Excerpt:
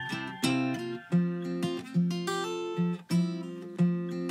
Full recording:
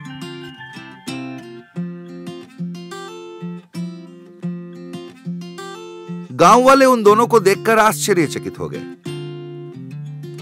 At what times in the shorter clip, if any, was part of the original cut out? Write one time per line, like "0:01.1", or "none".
none